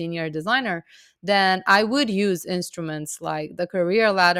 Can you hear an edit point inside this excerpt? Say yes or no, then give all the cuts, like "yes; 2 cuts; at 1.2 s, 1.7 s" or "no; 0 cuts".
no; 0 cuts